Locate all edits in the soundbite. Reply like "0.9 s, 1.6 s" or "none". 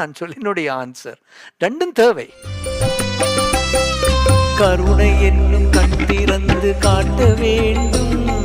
2.6 s